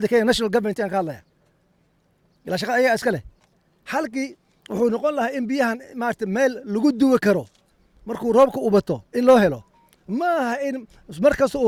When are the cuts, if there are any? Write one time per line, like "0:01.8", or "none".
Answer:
none